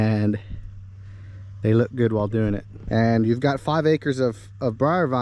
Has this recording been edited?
yes; 1 cut; at 2.7 s

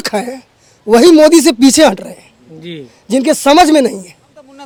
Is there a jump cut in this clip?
no; 0 cuts

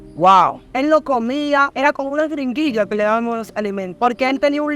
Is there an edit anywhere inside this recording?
yes; 2 cuts; at 1.7 s, 3.9 s

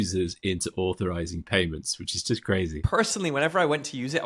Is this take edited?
yes; 1 cut; at 2.8 s

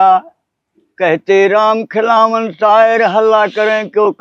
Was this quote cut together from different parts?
no; 0 cuts

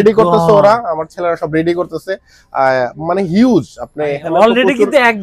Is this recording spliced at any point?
no; 0 cuts

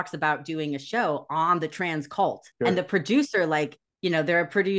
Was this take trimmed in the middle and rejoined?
yes; 2 cuts; at 2.5 s, 3.8 s

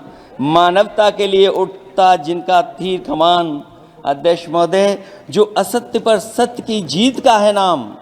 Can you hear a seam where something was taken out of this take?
no; 0 cuts

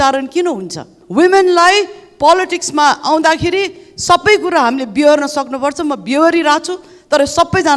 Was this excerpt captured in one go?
no; 1 cut; at 0.9 s

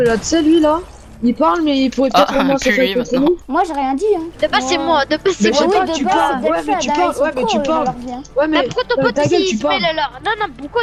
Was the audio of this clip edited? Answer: no; 0 cuts

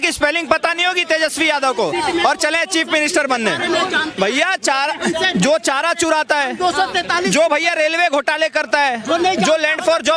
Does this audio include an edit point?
no; 0 cuts

